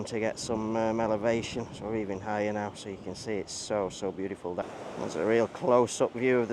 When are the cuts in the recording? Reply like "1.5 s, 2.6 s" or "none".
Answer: 4.6 s